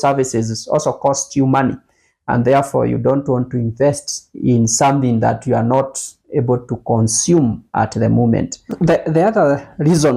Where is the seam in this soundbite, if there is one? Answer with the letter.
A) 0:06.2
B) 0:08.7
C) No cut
B